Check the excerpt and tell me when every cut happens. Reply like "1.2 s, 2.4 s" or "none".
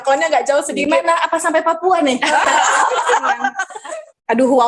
3.7 s